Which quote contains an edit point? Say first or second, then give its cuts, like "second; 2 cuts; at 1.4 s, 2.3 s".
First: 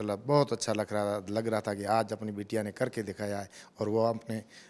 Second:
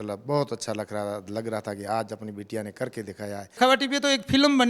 second; 1 cut; at 3.6 s